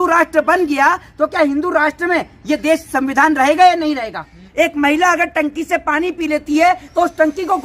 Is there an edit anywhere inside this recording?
yes; 1 cut; at 4.4 s

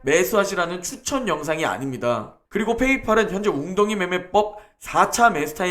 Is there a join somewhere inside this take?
yes; 1 cut; at 2.3 s

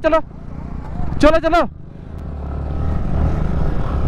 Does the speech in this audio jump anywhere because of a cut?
no; 0 cuts

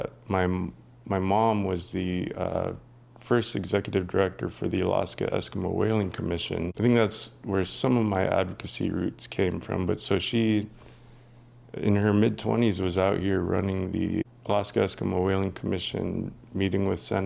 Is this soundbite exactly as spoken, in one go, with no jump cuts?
no; 2 cuts; at 6.7 s, 14.3 s

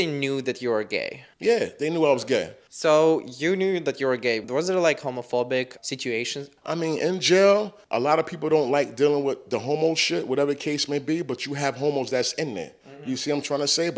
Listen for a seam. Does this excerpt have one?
no; 0 cuts

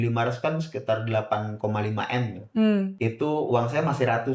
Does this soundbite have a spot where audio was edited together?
yes; 1 cut; at 2.9 s

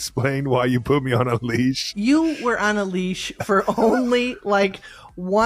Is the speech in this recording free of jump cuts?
yes; 0 cuts

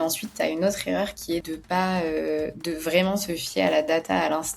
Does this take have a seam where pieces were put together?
yes; 1 cut; at 1.5 s

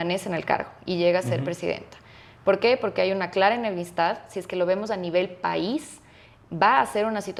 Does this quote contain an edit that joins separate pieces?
no; 0 cuts

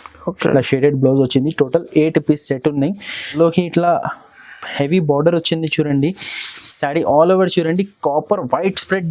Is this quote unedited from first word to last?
no; 1 cut; at 3.2 s

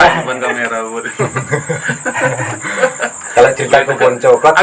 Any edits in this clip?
no; 0 cuts

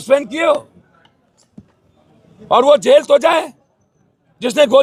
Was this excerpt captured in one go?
yes; 0 cuts

